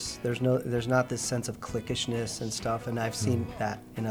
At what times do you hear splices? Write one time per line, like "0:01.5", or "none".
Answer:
none

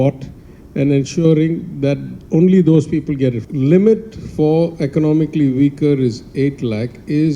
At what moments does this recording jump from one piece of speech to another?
0:03.4

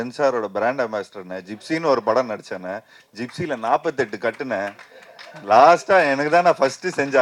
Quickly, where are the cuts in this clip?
none

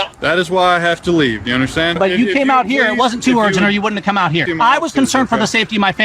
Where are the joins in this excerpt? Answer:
0:01.9
0:04.5

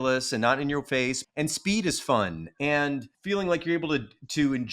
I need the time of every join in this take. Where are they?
0:01.2
0:03.1

